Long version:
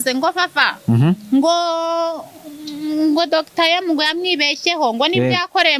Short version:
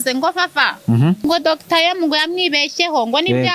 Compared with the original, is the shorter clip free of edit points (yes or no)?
no